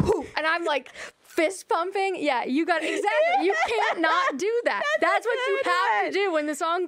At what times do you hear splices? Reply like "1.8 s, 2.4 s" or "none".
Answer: none